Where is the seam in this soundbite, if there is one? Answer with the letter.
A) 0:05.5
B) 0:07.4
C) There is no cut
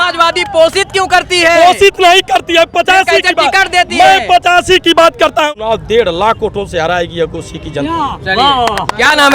A